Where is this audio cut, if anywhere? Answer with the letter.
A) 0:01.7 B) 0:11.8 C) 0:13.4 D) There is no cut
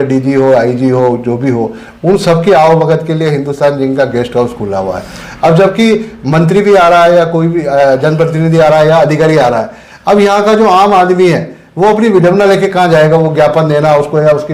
D